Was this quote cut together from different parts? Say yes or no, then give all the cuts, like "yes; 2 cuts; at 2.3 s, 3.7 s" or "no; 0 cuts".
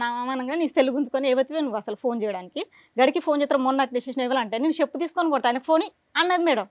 no; 0 cuts